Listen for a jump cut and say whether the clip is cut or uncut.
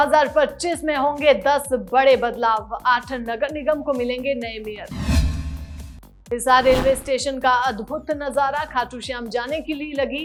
uncut